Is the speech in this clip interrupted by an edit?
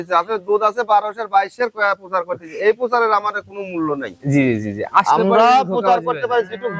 no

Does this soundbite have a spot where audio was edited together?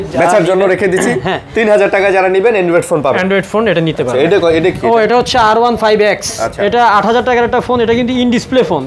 no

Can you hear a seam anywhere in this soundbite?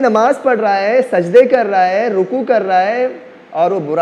no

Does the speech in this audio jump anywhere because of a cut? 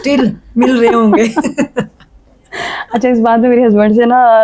no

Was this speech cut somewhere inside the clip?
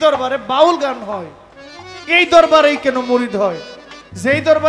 no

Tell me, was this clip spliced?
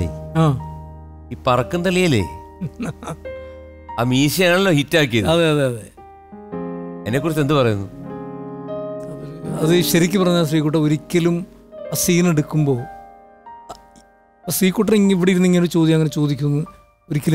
no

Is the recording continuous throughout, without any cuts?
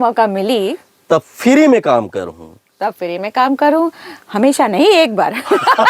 yes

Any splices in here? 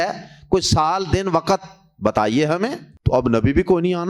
yes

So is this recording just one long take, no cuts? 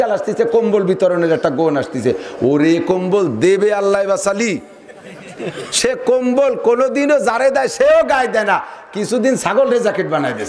yes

